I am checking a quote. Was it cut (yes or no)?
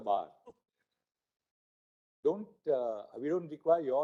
no